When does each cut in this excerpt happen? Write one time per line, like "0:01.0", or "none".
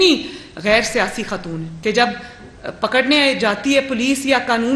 0:01.7

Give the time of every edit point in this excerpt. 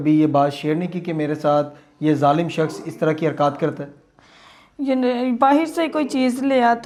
none

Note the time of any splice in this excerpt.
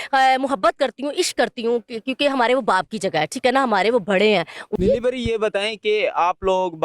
0:04.6

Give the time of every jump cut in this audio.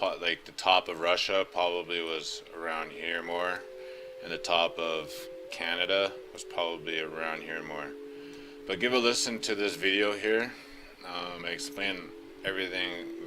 none

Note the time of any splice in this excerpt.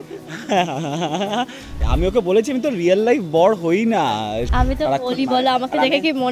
0:01.8
0:04.5

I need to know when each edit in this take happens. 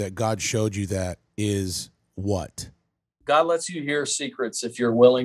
0:03.1

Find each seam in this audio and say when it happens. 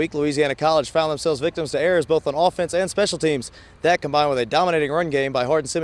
none

